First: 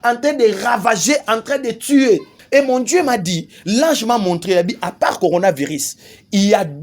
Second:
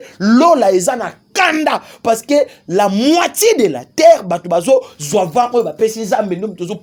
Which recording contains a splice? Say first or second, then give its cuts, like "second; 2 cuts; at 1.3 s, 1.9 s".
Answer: first; 1 cut; at 2.4 s